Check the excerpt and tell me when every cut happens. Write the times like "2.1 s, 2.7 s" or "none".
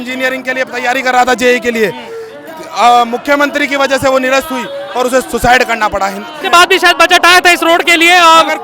6.4 s